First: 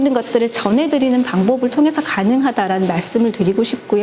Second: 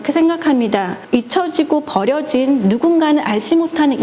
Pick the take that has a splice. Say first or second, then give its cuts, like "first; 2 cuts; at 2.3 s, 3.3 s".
second; 1 cut; at 1.0 s